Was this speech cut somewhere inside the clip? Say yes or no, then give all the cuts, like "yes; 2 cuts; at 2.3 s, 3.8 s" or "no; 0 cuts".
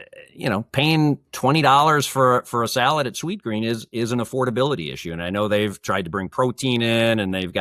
no; 0 cuts